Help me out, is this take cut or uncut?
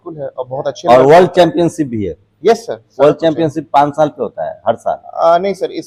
uncut